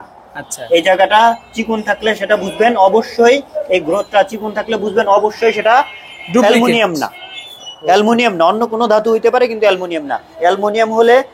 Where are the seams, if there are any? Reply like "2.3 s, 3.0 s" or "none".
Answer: none